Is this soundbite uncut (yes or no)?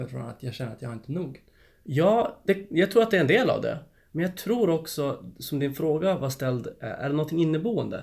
yes